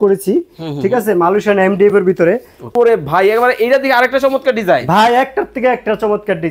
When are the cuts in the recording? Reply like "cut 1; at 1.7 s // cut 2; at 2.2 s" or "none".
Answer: cut 1; at 2.6 s